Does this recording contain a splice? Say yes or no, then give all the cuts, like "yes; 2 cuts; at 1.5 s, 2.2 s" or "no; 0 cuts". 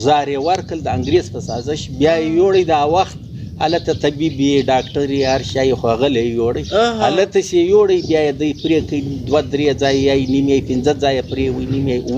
no; 0 cuts